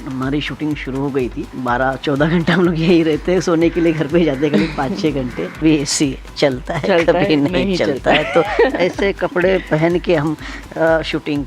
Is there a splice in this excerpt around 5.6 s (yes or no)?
yes